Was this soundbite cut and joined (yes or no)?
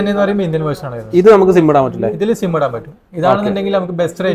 no